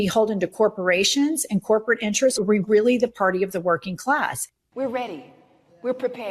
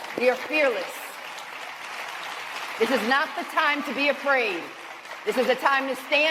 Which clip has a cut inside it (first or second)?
first